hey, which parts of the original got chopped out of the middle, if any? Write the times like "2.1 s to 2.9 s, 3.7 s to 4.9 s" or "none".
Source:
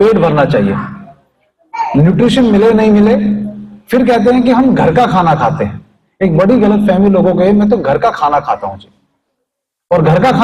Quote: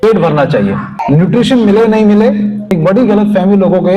1.0 s to 1.8 s, 3.5 s to 6.1 s

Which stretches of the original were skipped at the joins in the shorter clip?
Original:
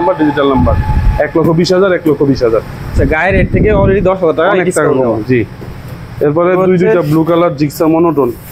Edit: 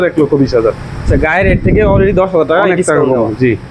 none

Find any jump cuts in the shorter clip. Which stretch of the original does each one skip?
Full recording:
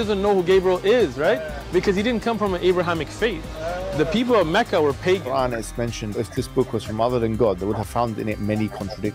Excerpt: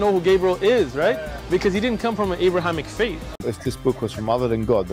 3.5 s to 6.0 s

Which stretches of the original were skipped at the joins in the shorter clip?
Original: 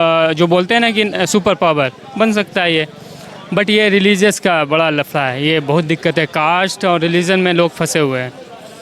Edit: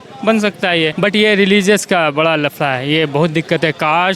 2.9 s to 3.5 s

